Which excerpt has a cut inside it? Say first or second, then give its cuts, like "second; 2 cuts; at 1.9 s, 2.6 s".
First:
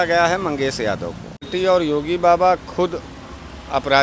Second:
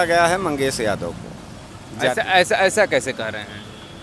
first; 1 cut; at 1.5 s